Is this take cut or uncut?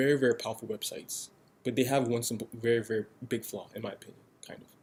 uncut